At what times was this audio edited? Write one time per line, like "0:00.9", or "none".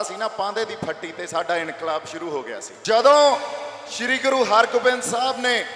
0:02.7